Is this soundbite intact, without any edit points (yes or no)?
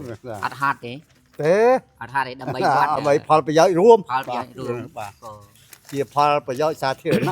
no